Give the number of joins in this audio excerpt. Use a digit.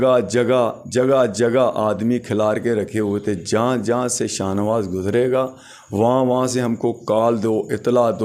0